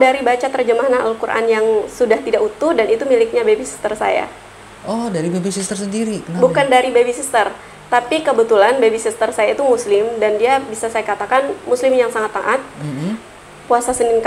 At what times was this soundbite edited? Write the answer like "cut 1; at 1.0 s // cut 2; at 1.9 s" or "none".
none